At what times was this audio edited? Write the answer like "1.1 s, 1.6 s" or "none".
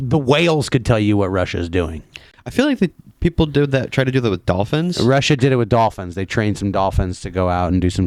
none